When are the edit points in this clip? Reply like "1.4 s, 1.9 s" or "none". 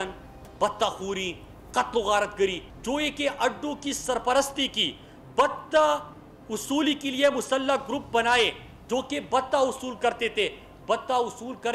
2.6 s